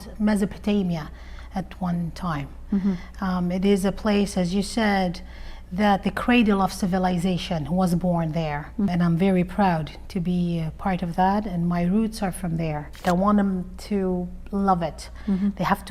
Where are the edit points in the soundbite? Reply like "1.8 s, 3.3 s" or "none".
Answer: 8.9 s, 13.0 s